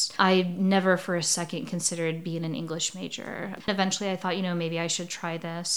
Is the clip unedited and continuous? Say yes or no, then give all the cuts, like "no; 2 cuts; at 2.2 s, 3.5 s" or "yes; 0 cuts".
no; 1 cut; at 3.6 s